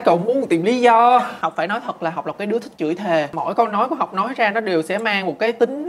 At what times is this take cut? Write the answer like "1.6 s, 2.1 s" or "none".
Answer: 1.4 s, 3.3 s